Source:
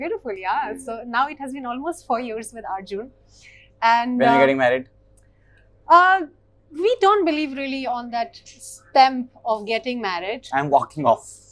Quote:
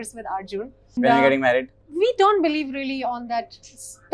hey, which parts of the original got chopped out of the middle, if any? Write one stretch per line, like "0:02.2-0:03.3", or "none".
0:03.3-0:04.1
0:05.0-0:06.6